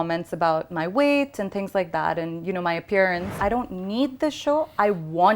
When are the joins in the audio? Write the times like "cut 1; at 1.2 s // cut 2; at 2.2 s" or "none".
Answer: cut 1; at 3.4 s